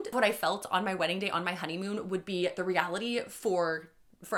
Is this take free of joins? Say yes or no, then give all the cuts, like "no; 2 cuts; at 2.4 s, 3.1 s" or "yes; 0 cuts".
yes; 0 cuts